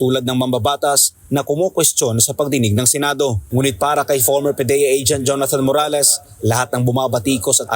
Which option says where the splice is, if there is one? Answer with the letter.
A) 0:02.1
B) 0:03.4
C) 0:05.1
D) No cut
D